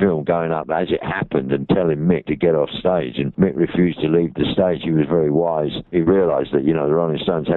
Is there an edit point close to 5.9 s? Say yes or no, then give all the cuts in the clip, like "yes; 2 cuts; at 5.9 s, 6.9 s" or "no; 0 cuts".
yes; 2 cuts; at 2.2 s, 5.9 s